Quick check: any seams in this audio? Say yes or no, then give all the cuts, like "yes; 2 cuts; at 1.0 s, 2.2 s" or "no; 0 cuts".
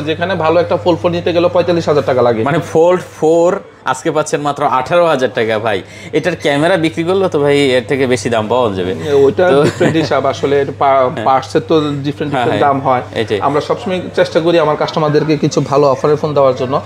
no; 0 cuts